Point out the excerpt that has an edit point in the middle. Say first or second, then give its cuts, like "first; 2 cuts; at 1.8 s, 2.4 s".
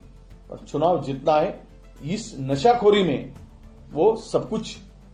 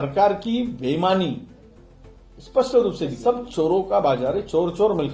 second; 1 cut; at 3.2 s